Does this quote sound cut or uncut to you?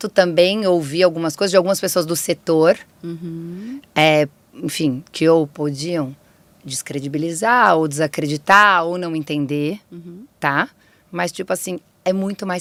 uncut